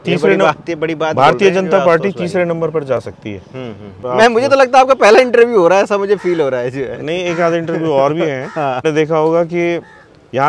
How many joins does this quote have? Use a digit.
2